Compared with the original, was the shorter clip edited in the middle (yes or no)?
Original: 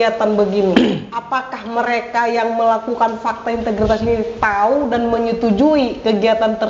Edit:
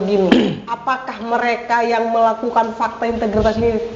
no